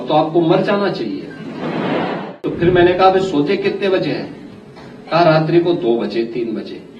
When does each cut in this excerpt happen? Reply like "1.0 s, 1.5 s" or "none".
2.4 s